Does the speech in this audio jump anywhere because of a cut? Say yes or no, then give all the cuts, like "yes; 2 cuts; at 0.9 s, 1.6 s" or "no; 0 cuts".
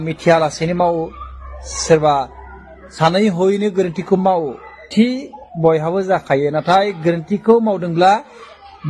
yes; 1 cut; at 4.8 s